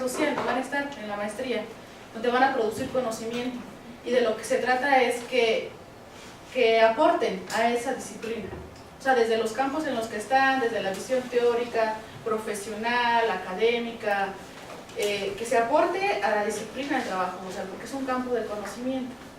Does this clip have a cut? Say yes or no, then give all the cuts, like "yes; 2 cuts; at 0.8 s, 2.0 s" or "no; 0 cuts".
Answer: yes; 1 cut; at 17.9 s